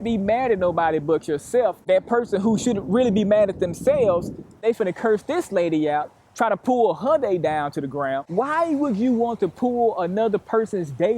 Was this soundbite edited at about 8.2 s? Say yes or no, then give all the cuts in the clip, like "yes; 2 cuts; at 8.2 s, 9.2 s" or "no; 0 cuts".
yes; 1 cut; at 8.2 s